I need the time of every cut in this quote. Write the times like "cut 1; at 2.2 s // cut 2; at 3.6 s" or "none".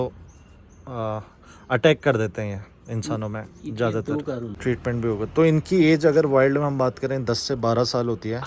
cut 1; at 4.5 s